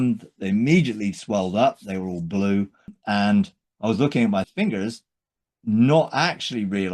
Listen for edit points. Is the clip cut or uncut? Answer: cut